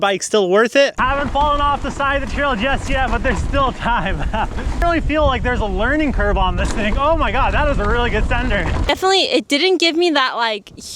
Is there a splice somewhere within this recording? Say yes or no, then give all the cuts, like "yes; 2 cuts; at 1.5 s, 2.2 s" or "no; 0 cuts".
yes; 3 cuts; at 0.9 s, 4.8 s, 8.8 s